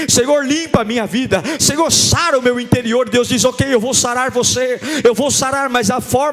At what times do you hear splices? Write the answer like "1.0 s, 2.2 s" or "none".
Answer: none